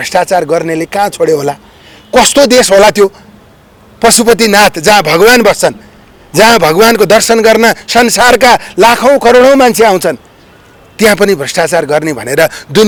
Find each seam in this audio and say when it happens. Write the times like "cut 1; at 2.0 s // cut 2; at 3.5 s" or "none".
none